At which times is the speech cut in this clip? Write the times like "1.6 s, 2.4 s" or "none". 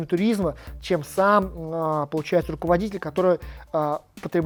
none